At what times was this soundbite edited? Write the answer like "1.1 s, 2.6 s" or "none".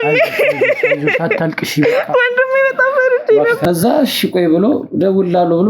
3.6 s